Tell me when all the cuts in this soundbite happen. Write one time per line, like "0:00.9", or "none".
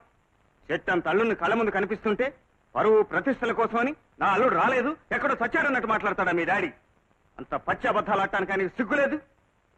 none